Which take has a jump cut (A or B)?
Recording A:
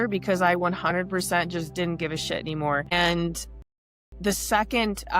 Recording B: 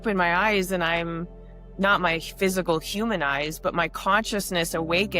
A